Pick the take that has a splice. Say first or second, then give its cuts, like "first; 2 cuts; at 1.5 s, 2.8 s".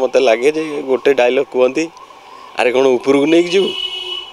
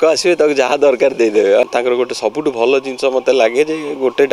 second; 1 cut; at 1.7 s